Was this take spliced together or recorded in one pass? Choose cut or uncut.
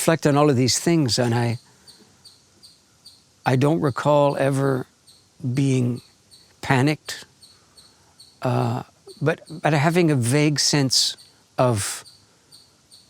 uncut